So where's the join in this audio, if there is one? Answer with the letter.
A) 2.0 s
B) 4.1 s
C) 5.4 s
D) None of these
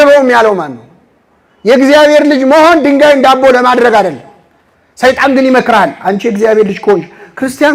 D